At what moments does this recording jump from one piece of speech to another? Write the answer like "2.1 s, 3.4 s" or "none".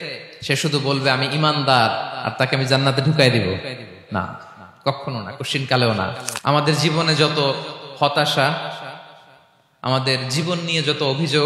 6.3 s